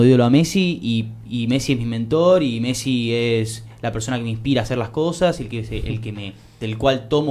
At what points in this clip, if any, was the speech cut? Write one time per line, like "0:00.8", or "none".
none